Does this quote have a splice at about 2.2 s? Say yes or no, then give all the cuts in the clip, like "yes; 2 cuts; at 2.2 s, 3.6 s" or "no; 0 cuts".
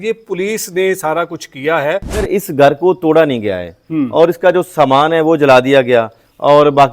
yes; 1 cut; at 2.2 s